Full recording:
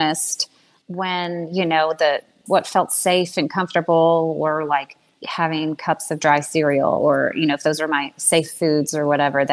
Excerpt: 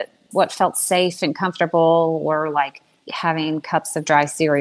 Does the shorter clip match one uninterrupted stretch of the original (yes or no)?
yes